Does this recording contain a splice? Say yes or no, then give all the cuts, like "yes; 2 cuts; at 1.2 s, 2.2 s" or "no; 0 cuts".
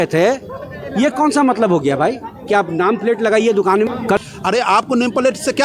yes; 1 cut; at 4.2 s